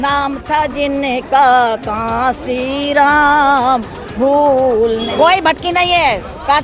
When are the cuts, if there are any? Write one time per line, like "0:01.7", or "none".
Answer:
0:05.1